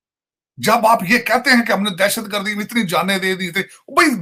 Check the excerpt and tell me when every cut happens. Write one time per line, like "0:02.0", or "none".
none

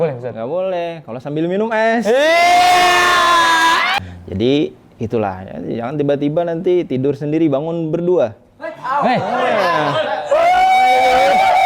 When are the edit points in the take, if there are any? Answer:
0:03.9

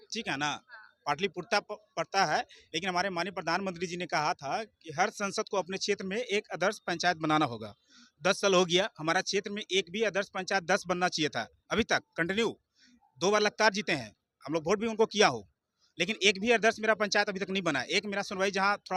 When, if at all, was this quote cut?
none

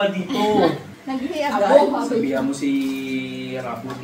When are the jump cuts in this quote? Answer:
0:00.9

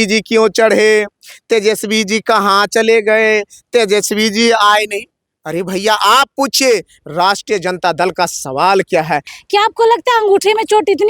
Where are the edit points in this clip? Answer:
0:09.3

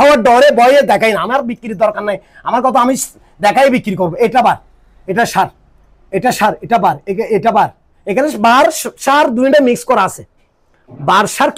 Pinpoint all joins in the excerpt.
none

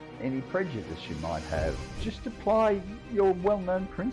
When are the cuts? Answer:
0:01.9

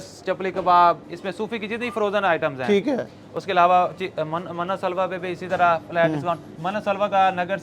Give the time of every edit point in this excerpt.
none

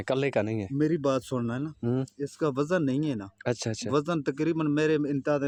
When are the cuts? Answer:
none

